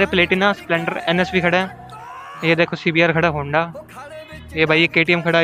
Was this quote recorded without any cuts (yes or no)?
no